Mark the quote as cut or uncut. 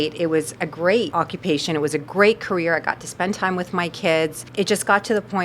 cut